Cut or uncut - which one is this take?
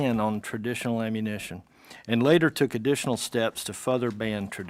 uncut